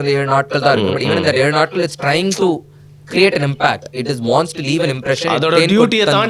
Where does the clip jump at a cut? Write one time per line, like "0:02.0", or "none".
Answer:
none